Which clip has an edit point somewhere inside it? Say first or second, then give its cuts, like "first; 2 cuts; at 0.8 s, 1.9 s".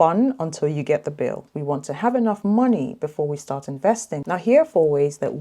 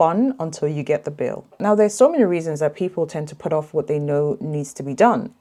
first; 2 cuts; at 1.5 s, 4.3 s